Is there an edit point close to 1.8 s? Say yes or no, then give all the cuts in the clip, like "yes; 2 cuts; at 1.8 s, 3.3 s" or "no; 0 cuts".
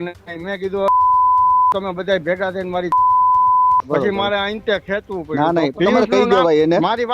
no; 2 cuts; at 3.9 s, 5.7 s